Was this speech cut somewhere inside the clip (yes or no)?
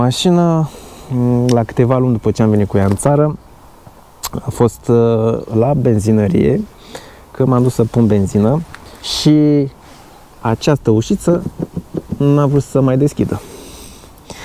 no